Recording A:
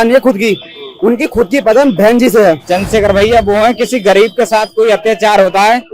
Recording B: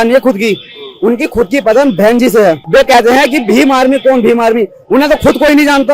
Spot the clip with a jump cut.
A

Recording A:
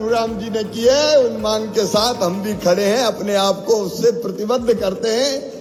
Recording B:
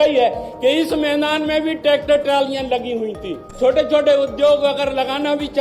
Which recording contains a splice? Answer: B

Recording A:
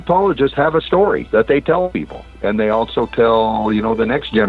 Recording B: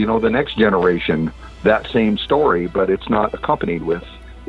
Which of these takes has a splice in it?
A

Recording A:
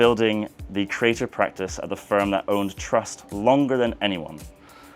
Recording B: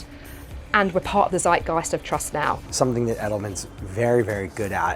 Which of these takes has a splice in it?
B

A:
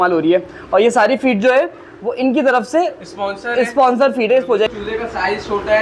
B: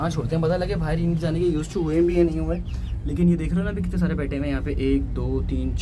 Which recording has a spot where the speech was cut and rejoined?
A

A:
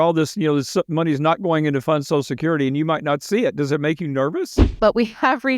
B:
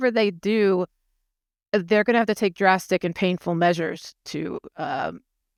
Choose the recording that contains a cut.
A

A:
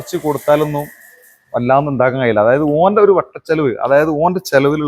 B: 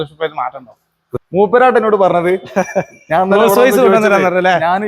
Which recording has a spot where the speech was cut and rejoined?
B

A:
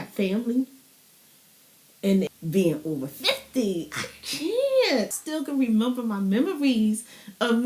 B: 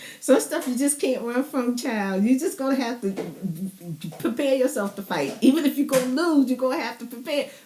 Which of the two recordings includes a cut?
A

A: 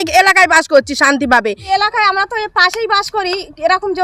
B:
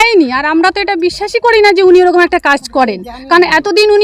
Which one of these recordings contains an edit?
A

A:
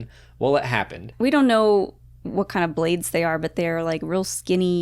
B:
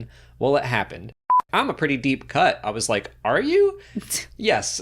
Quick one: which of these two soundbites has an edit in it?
B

